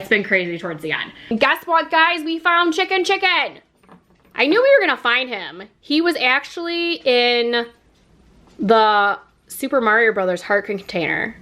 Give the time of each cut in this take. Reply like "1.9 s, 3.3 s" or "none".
1.3 s